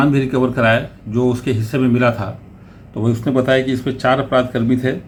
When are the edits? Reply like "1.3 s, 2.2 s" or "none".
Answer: none